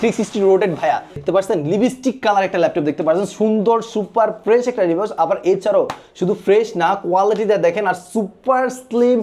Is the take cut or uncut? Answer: cut